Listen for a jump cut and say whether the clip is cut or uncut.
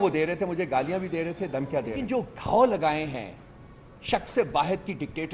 cut